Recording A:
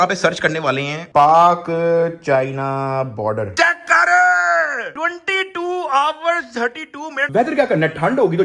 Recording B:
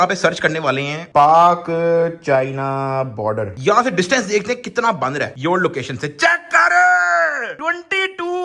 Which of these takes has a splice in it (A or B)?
A